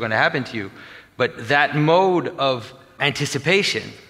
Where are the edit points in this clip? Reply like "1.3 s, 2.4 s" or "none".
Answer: 2.9 s